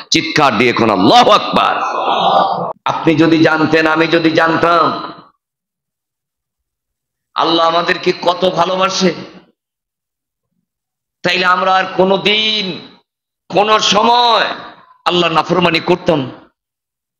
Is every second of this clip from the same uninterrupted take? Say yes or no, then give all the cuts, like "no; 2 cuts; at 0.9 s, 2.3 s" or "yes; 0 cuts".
no; 1 cut; at 2.8 s